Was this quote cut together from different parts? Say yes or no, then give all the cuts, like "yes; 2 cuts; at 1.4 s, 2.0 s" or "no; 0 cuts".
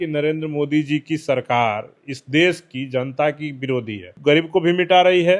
yes; 1 cut; at 4.1 s